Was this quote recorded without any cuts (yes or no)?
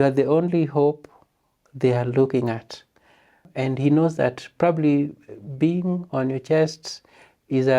no